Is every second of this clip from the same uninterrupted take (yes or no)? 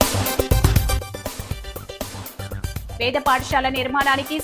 no